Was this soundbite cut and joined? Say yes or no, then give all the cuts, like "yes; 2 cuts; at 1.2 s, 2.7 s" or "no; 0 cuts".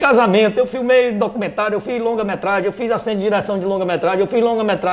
no; 0 cuts